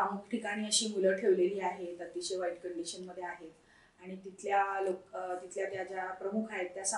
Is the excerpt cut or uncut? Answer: uncut